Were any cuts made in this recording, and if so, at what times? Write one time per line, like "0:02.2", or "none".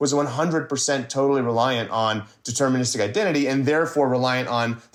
none